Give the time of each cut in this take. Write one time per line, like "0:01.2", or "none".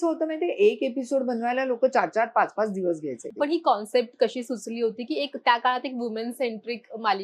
0:03.2